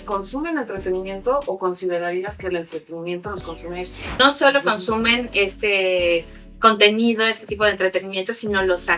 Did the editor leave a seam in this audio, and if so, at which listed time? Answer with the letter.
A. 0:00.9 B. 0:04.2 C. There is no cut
B